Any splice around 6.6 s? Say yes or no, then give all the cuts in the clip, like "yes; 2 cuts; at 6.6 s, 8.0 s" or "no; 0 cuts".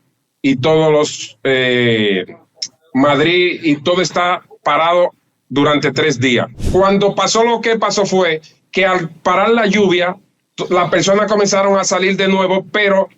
yes; 1 cut; at 6.6 s